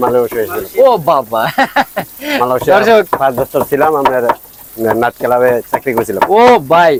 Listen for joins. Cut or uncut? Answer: uncut